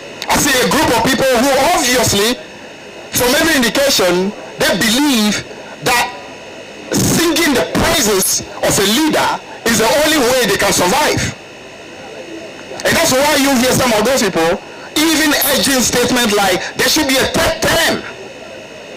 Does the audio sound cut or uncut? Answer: uncut